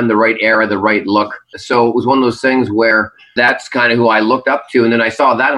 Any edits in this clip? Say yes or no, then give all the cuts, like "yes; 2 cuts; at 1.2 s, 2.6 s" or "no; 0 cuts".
yes; 2 cuts; at 1.5 s, 3.3 s